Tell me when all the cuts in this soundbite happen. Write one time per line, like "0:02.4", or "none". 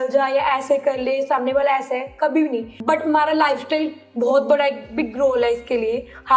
0:02.7